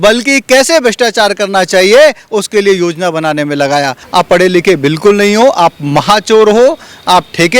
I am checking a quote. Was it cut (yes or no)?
yes